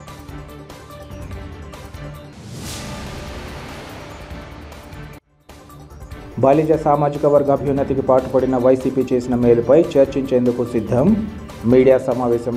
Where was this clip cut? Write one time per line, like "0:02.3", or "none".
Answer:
none